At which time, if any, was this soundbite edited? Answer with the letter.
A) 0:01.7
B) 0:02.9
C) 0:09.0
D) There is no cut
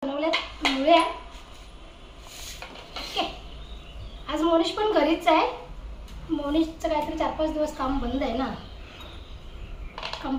D